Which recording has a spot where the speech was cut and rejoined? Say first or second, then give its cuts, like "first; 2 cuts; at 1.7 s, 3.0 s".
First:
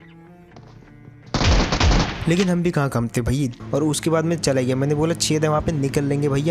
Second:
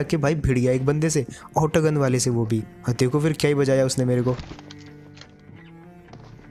first; 1 cut; at 3.6 s